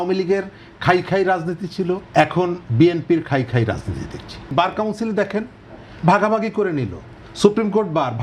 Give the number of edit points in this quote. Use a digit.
2